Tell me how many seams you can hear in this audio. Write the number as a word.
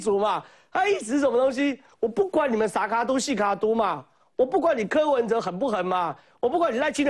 zero